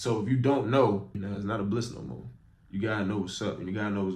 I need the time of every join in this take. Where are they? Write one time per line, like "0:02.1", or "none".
0:01.2